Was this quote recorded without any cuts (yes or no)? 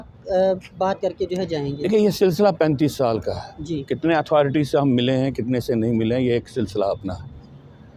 yes